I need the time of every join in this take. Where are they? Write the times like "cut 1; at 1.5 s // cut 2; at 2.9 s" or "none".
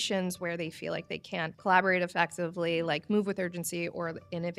none